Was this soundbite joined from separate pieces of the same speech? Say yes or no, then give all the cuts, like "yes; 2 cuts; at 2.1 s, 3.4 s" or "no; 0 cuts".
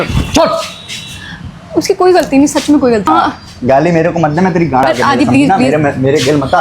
yes; 2 cuts; at 3.1 s, 4.8 s